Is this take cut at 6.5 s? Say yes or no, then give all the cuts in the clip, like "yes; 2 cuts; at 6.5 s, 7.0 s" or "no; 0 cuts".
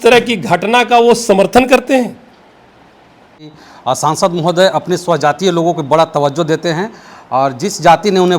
no; 1 cut; at 3.6 s